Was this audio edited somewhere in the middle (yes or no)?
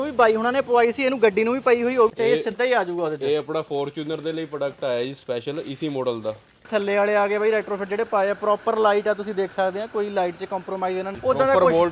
yes